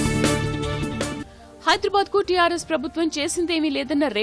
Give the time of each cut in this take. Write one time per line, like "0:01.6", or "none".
0:01.2